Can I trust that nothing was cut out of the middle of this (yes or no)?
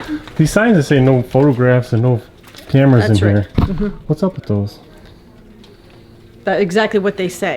yes